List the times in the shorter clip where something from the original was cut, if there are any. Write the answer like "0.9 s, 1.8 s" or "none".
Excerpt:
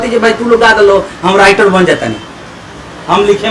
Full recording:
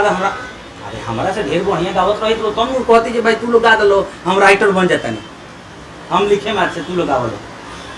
none